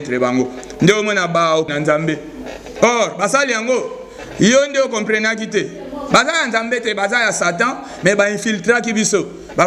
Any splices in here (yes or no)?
yes